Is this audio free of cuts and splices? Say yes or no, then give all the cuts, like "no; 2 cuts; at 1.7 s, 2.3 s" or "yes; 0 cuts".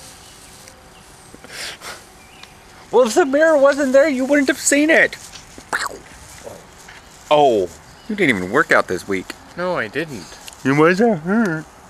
yes; 0 cuts